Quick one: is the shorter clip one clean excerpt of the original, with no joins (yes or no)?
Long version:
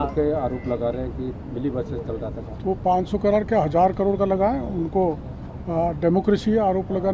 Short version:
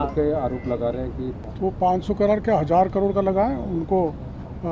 no